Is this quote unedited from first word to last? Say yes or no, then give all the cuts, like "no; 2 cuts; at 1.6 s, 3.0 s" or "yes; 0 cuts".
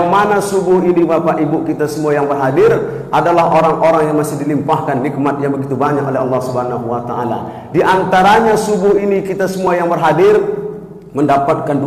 yes; 0 cuts